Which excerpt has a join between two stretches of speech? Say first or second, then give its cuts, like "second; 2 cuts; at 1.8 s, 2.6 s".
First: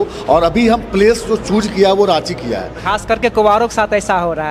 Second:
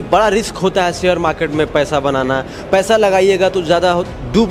first; 1 cut; at 2.7 s